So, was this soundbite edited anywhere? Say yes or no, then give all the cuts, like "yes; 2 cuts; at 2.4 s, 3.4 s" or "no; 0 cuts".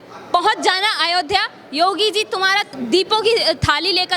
yes; 1 cut; at 2.7 s